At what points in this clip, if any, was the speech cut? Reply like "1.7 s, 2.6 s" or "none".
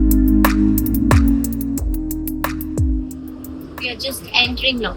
1.2 s